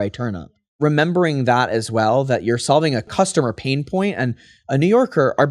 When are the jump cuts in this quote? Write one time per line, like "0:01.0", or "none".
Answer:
0:00.8
0:03.1